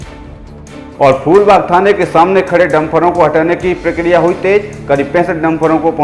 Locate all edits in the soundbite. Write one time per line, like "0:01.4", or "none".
0:00.9

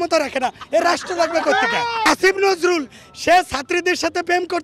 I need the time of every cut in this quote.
0:02.0

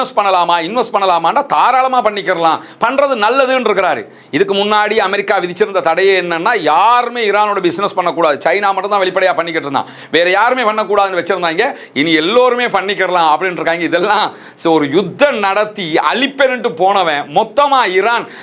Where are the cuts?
none

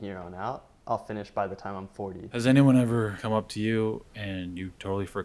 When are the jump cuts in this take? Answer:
0:02.2
0:03.2

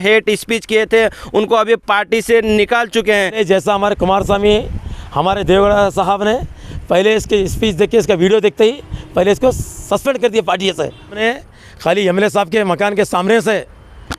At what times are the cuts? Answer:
0:03.4
0:11.2

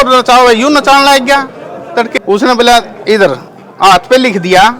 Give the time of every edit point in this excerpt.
0:02.1

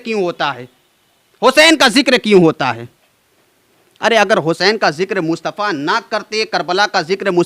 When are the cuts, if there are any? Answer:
none

